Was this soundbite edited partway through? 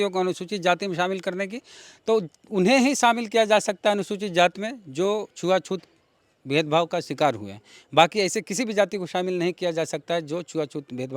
no; 0 cuts

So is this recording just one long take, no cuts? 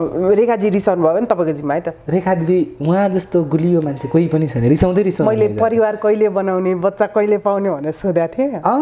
yes; 0 cuts

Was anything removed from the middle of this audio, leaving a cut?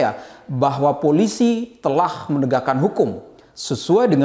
no; 0 cuts

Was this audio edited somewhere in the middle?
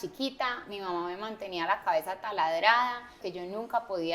yes; 1 cut; at 3.2 s

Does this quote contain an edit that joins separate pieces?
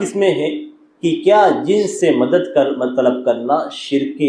no; 0 cuts

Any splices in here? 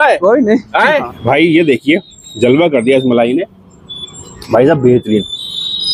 yes; 1 cut; at 1.1 s

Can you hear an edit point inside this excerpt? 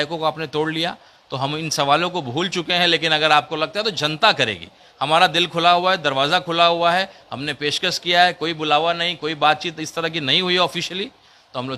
no; 0 cuts

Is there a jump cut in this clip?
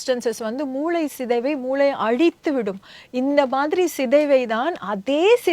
no; 0 cuts

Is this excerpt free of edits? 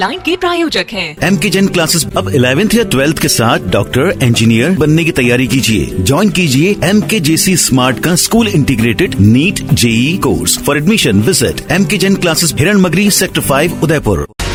yes; 0 cuts

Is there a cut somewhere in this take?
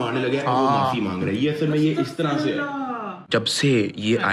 yes; 1 cut; at 3.2 s

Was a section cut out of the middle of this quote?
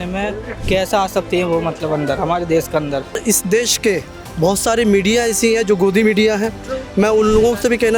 yes; 1 cut; at 3.2 s

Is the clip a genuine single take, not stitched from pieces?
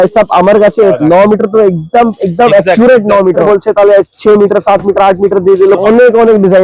no; 3 cuts; at 1.0 s, 3.4 s, 5.8 s

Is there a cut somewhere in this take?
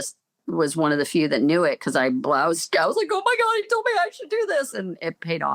no; 0 cuts

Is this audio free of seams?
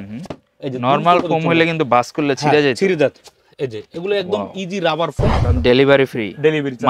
no; 1 cut; at 5.4 s

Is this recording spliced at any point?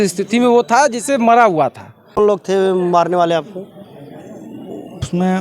yes; 1 cut; at 2.2 s

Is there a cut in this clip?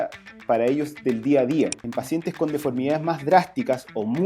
yes; 1 cut; at 1.8 s

